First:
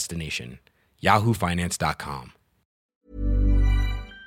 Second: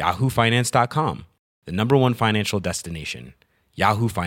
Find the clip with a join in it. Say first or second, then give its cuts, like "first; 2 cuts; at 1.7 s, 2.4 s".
first; 1 cut; at 2.9 s